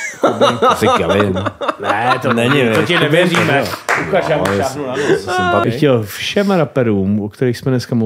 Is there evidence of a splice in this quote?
yes; 1 cut; at 5.6 s

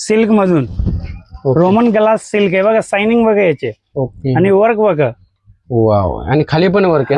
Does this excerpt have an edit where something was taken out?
no; 0 cuts

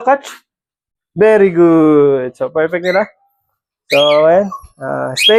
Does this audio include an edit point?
no; 0 cuts

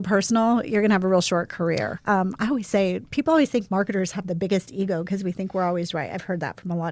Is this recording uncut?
no; 1 cut; at 1.9 s

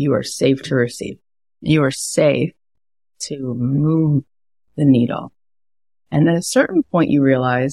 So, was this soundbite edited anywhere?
no; 0 cuts

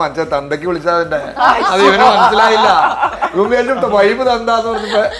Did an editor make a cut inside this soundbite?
no; 0 cuts

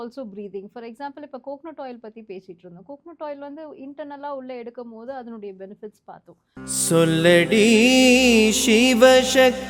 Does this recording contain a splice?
yes; 1 cut; at 6.4 s

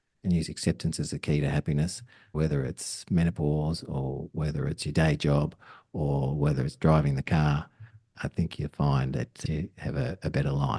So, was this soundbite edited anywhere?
yes; 2 cuts; at 2.3 s, 9.4 s

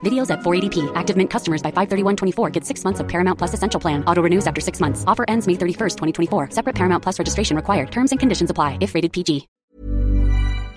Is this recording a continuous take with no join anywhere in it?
no; 1 cut; at 9.5 s

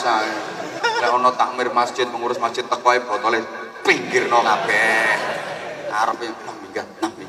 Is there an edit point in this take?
no; 0 cuts

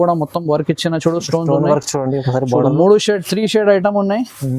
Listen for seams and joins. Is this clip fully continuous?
yes; 0 cuts

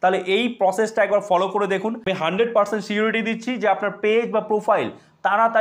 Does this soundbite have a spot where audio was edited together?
yes; 1 cut; at 2.0 s

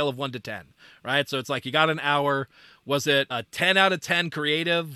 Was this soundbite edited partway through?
no; 0 cuts

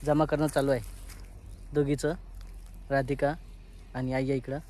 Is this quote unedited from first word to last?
yes; 0 cuts

